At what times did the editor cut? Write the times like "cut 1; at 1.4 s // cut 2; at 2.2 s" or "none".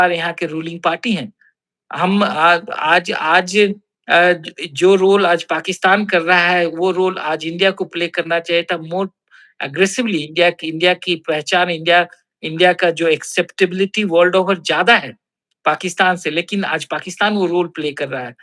none